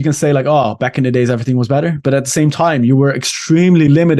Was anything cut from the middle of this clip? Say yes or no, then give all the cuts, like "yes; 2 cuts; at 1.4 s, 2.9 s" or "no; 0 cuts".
no; 0 cuts